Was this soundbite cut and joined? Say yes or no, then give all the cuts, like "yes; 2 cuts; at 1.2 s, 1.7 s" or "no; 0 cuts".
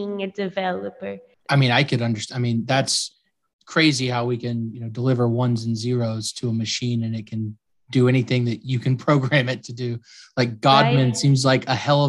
yes; 1 cut; at 1.3 s